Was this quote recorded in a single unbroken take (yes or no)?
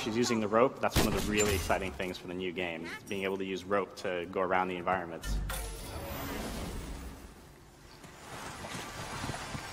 yes